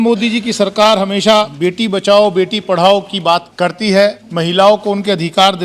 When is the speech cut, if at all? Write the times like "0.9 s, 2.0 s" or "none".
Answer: 1.5 s, 3.5 s, 4.2 s